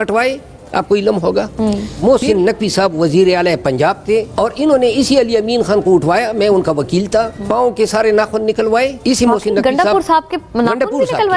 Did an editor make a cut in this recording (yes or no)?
yes